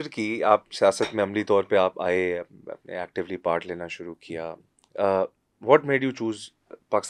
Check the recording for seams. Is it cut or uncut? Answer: uncut